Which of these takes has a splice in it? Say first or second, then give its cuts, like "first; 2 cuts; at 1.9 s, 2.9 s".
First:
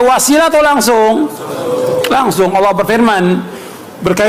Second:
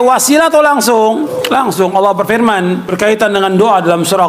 second; 2 cuts; at 1.4 s, 2.9 s